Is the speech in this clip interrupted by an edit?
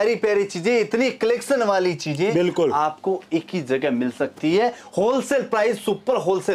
no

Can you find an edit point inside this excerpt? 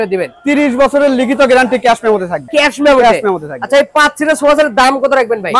no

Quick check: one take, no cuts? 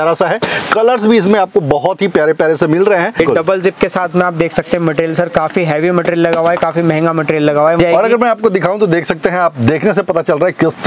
no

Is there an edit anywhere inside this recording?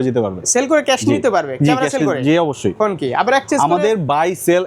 no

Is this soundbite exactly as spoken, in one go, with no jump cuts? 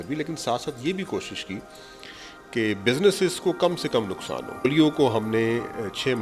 no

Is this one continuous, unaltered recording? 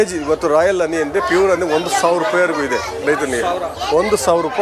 yes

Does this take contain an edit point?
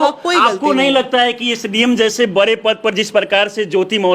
no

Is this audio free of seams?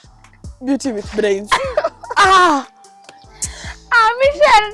yes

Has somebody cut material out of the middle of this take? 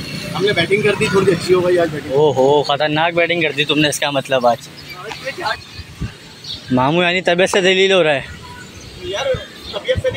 no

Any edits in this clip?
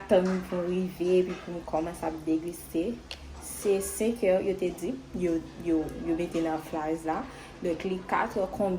no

